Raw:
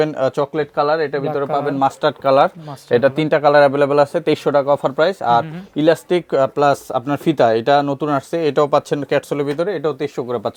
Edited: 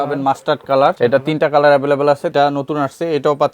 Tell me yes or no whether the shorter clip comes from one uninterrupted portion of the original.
no